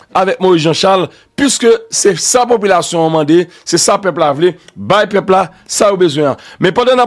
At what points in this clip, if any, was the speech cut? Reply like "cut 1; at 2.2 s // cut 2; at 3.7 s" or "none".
none